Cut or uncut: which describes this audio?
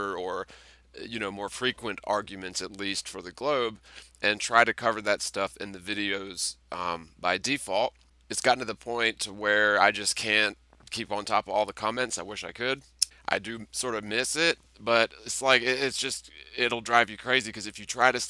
uncut